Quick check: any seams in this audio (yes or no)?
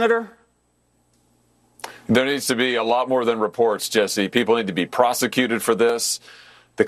no